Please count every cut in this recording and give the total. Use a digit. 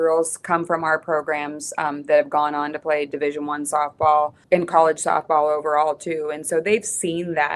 1